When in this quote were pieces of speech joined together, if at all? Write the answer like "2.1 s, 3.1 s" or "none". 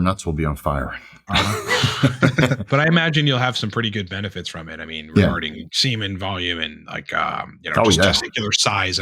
2.7 s